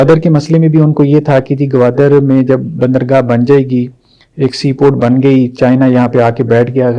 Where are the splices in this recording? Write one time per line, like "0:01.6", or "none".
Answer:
none